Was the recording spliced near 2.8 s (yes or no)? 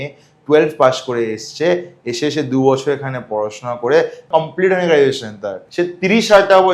no